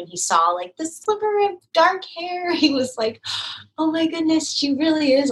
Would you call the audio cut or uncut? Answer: uncut